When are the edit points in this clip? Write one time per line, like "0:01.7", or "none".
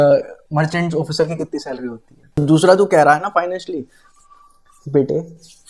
0:02.4

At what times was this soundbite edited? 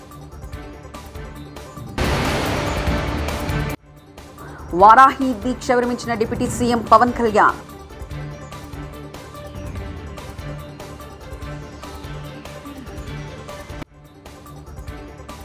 none

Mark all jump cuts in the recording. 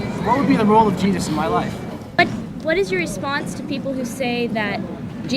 0:02.2

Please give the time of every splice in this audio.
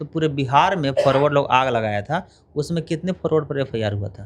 none

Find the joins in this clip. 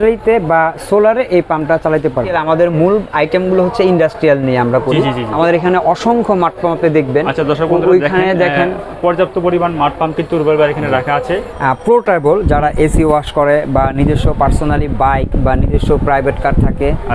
0:02.3
0:05.3
0:11.5

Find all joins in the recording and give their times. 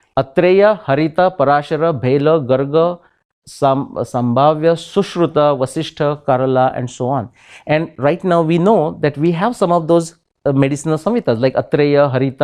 none

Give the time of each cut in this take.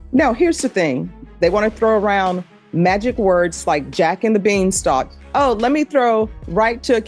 0:01.2

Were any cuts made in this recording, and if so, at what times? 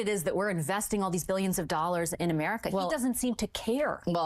none

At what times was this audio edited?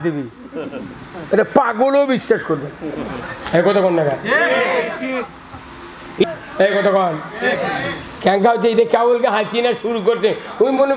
0:06.2

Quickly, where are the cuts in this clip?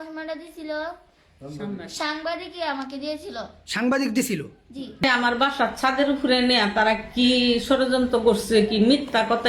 0:05.0

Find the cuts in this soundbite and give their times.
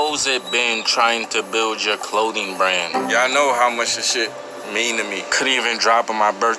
0:02.9
0:05.3

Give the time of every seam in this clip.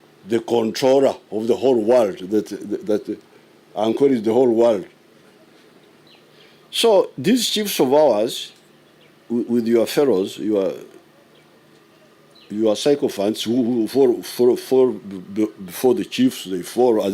0:06.1

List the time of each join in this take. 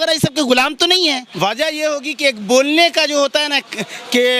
0:01.3

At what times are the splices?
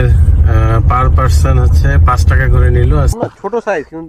0:03.2

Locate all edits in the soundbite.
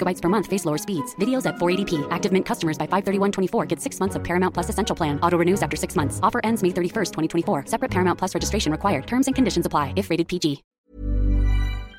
0:10.7

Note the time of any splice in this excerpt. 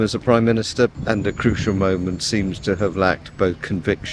0:01.0

